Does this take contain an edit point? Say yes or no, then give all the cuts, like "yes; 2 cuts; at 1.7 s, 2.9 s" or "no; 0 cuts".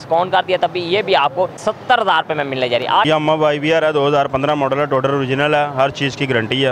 yes; 2 cuts; at 1.6 s, 3.1 s